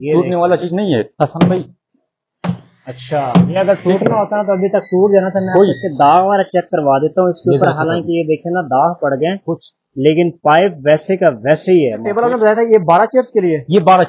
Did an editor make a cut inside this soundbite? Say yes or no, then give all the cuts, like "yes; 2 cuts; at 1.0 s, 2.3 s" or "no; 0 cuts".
yes; 1 cut; at 12.1 s